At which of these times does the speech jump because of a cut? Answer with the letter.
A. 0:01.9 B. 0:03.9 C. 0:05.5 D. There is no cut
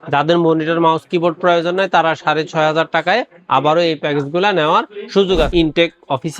C